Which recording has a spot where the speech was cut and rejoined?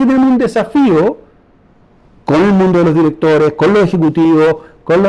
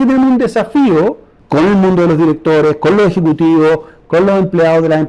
second; 1 cut; at 1.3 s

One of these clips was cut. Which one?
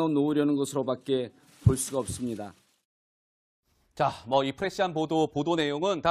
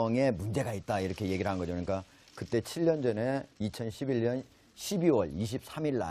first; 1 cut; at 3.0 s

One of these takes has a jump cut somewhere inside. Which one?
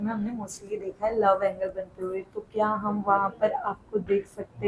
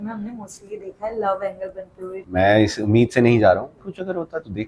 second; 2 cuts; at 2.2 s, 3.8 s

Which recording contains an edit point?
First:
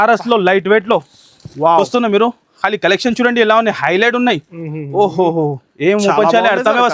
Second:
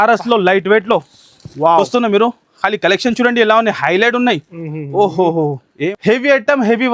second; 1 cut; at 5.8 s

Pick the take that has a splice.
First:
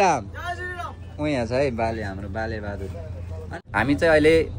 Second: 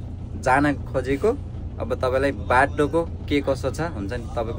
first; 1 cut; at 3.5 s

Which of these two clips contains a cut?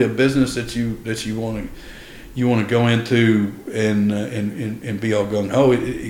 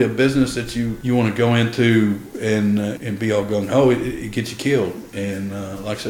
second; 2 cuts; at 1.0 s, 3.0 s

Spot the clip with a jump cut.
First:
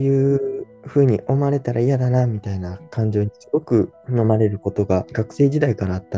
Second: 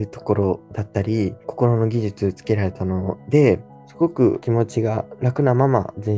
second; 1 cut; at 3.8 s

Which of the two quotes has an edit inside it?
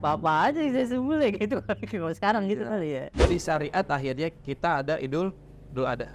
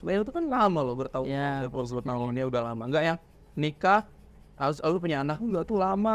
first; 1 cut; at 3.2 s

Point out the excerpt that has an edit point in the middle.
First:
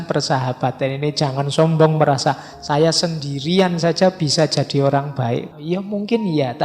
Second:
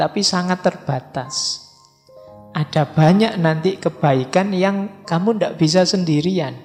first; 1 cut; at 5.5 s

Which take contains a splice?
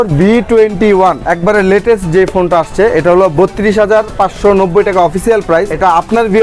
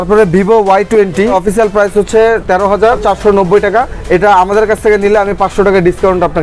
second; 2 cuts; at 3.0 s, 4.0 s

